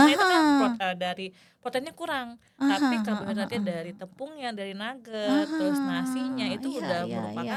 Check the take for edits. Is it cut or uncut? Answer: uncut